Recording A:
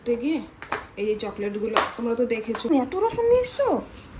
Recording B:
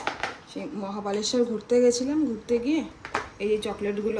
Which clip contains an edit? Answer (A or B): A